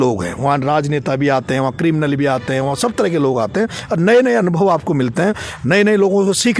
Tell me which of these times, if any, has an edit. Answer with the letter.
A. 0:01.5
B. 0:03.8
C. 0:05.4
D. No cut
D